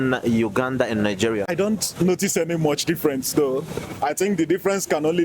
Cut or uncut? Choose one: cut